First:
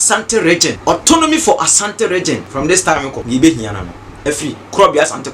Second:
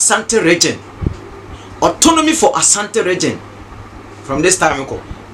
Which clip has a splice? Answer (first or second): first